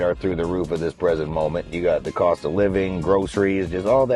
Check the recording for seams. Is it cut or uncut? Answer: cut